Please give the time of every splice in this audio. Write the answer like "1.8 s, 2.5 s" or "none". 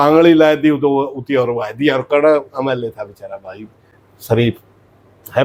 none